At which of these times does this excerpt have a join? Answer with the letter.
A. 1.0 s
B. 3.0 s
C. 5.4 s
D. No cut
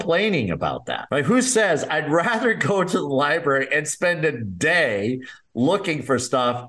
A